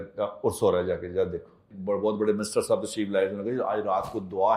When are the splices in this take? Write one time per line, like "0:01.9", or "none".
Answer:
0:01.7